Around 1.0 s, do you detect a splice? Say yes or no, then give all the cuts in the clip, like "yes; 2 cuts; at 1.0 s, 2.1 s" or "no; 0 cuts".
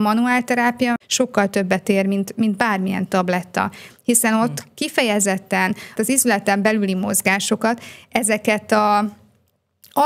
yes; 1 cut; at 1.0 s